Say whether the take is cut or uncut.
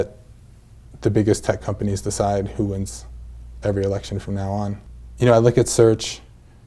cut